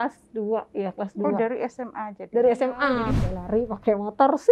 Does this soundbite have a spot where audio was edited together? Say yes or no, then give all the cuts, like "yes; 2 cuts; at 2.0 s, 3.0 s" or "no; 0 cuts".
yes; 1 cut; at 3.1 s